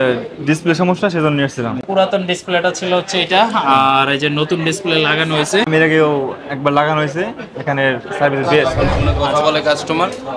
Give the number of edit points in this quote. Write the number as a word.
three